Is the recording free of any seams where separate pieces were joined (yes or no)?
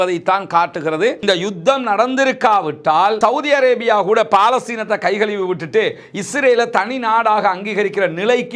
no